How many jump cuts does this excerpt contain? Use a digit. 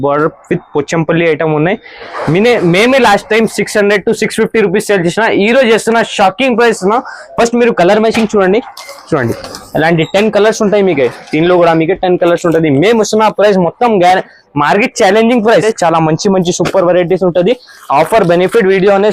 1